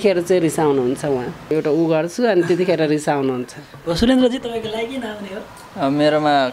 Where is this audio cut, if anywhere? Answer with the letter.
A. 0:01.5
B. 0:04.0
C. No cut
A